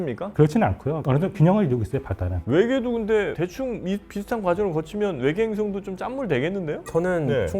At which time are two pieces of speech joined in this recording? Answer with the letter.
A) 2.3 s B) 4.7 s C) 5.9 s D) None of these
A